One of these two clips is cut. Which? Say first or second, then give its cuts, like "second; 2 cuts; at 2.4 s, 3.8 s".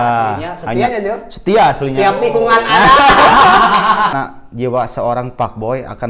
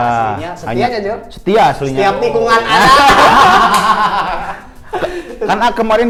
first; 1 cut; at 4.1 s